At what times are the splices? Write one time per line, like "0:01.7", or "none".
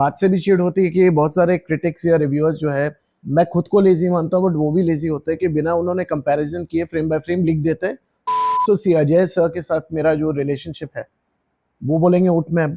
0:03.2
0:08.4